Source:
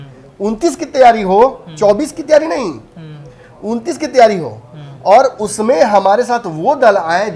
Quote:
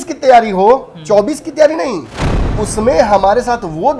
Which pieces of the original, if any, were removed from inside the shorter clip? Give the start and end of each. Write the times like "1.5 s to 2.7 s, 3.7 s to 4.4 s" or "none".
3.3 s to 5.4 s